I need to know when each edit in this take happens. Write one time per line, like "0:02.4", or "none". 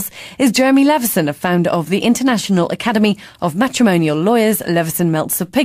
none

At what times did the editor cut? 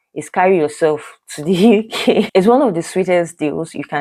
0:02.3

